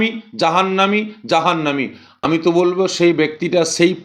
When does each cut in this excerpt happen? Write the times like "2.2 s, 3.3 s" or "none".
2.2 s